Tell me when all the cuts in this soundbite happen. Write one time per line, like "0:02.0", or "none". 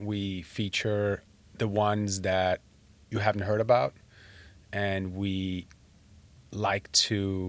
0:01.4